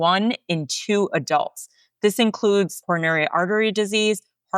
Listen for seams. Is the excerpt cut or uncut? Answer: cut